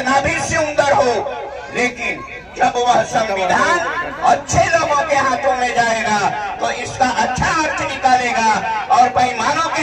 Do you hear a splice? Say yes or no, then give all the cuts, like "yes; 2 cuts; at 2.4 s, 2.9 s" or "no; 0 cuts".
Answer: no; 0 cuts